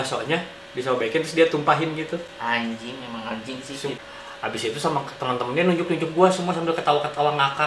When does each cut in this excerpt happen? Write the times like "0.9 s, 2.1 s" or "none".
4.0 s